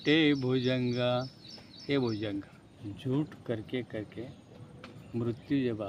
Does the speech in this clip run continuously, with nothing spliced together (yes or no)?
no